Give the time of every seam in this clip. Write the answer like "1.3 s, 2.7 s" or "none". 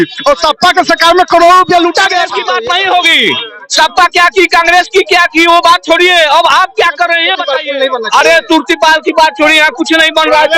2.4 s, 7.4 s